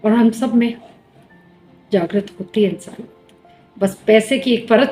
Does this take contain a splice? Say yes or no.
no